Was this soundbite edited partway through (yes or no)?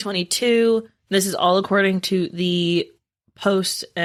no